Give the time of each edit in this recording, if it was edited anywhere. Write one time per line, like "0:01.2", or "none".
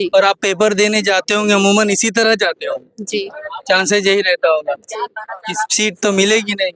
none

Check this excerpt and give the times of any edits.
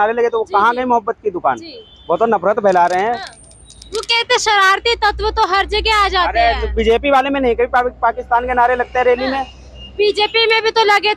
none

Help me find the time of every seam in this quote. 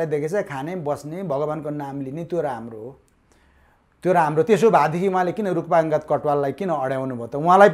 none

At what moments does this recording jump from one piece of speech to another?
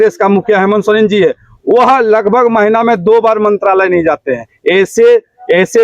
none

